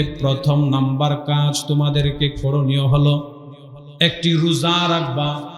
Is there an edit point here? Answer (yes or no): no